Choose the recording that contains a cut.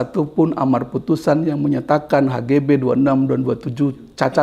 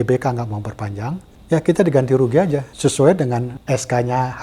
second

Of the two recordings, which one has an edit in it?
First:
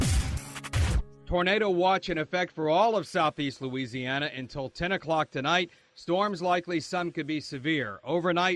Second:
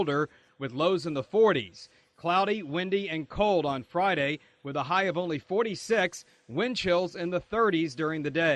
first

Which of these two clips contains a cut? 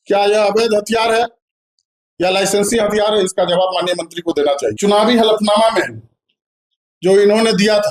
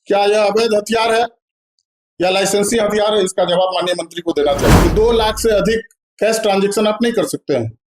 second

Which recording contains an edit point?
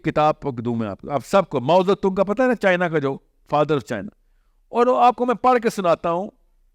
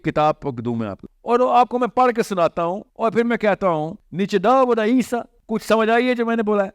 second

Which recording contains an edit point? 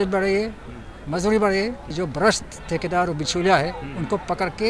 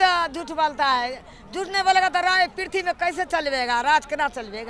first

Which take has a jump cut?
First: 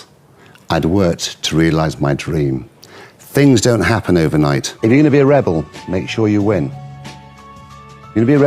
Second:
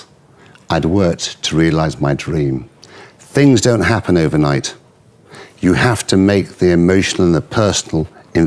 first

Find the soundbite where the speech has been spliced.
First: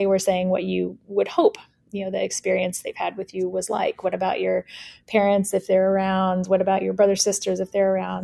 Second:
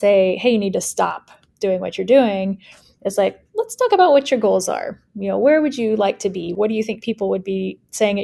second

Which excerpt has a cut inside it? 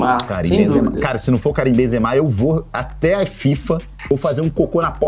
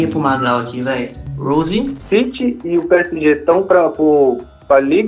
second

